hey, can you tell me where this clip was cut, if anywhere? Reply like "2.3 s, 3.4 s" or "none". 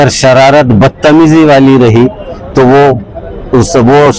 none